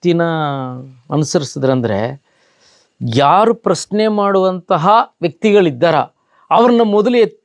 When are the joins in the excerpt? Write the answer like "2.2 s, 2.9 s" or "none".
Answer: none